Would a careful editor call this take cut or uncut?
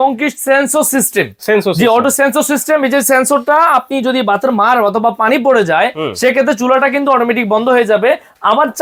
uncut